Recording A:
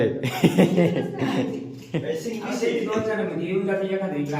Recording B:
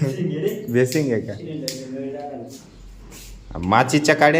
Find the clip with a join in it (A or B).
B